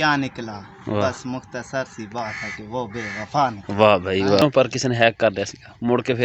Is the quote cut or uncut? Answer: cut